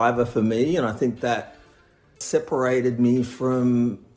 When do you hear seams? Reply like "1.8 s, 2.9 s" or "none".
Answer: 2.1 s

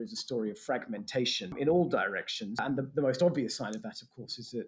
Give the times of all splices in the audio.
1.5 s, 2.6 s

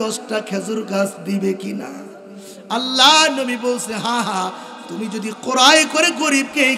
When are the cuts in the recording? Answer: none

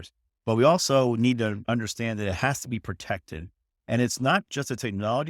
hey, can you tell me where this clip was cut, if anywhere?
1.6 s

